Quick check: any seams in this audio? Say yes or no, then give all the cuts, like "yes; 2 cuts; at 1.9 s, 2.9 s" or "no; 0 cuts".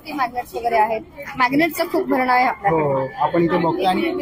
no; 0 cuts